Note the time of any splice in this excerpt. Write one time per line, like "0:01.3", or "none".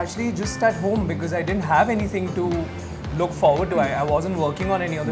none